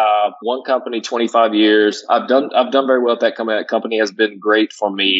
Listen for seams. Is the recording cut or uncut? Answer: uncut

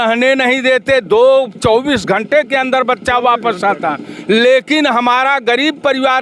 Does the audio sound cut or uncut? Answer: uncut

